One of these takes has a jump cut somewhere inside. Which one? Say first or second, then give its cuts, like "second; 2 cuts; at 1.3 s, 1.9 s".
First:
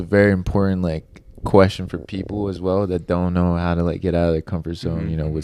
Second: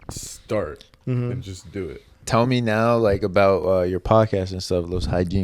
second; 1 cut; at 2.2 s